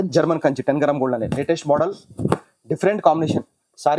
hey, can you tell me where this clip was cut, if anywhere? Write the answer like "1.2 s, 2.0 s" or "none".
none